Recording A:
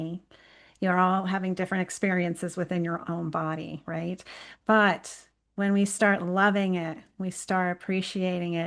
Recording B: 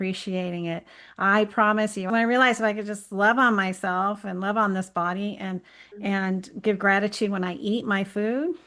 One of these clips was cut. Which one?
B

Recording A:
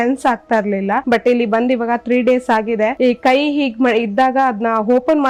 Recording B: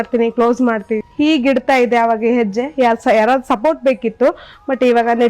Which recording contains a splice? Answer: B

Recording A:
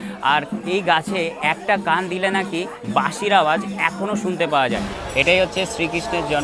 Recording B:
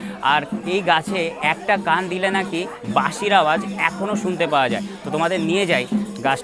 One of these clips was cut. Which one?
A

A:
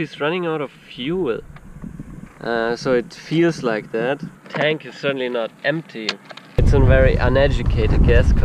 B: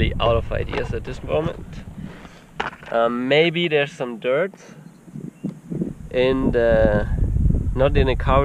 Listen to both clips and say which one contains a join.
A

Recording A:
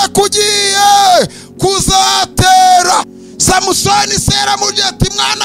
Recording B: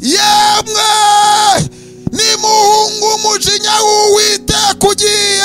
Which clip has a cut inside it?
A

